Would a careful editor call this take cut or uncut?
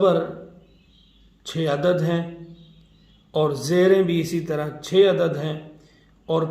uncut